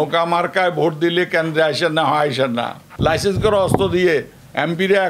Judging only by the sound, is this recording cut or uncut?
cut